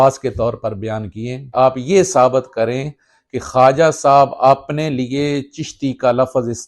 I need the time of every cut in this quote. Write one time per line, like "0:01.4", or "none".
0:01.4